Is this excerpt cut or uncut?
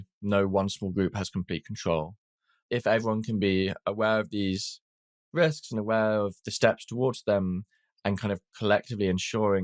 cut